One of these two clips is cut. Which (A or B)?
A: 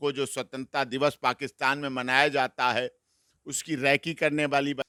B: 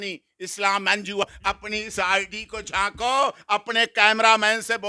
B